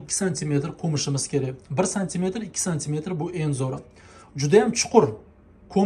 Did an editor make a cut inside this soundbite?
no; 0 cuts

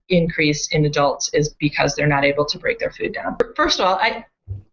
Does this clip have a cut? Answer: yes; 1 cut; at 3.4 s

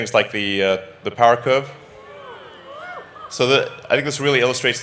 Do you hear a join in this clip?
no; 0 cuts

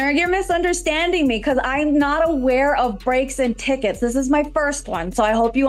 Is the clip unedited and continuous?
yes; 0 cuts

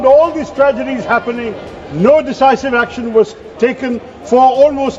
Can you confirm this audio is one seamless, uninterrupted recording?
yes; 0 cuts

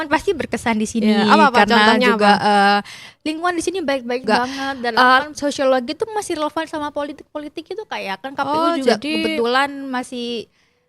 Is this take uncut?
no; 1 cut; at 4.9 s

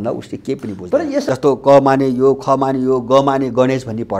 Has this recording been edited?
yes; 1 cut; at 1.2 s

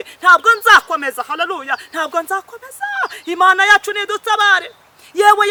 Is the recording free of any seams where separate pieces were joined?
yes; 0 cuts

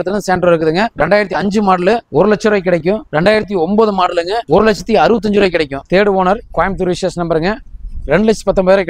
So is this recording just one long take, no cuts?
no; 5 cuts; at 0.9 s, 2.0 s, 3.1 s, 4.4 s, 5.8 s

